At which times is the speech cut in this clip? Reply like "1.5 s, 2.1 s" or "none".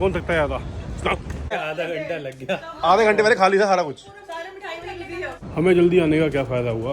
1.5 s, 5.4 s